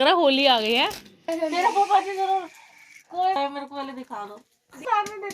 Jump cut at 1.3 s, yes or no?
yes